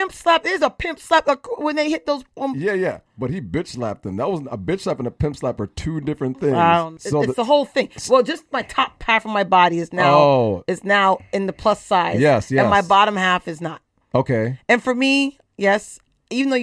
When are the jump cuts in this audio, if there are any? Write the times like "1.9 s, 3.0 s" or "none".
7.0 s